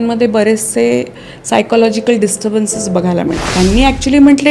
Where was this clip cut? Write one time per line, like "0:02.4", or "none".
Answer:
0:03.5